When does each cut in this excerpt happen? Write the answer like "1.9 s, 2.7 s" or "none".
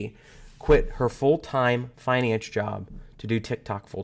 none